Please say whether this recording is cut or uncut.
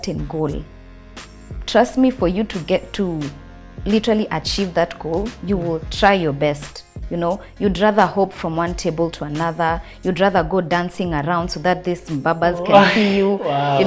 uncut